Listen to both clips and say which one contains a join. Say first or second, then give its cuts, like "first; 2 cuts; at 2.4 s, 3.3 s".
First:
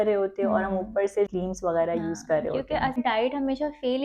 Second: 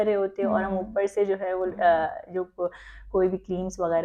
first; 2 cuts; at 1.3 s, 3.0 s